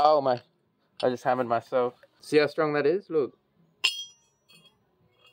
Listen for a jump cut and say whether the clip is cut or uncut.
cut